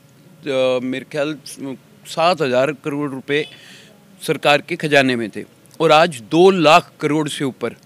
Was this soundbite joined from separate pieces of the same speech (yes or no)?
no